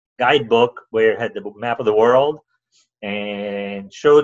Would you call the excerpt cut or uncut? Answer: uncut